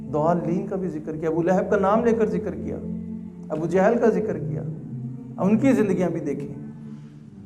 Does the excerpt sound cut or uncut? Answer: uncut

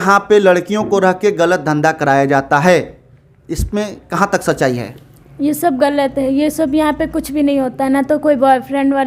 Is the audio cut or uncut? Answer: uncut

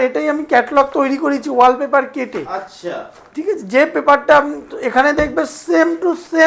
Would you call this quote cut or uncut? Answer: uncut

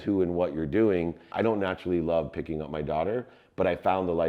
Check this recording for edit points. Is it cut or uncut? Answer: cut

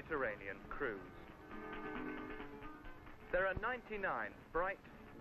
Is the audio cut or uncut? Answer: cut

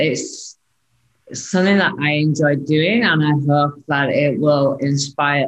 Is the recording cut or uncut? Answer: uncut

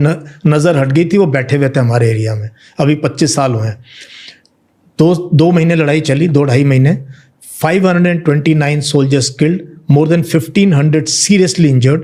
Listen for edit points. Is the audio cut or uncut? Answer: uncut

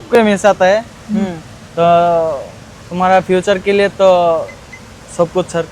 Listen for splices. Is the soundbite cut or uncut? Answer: uncut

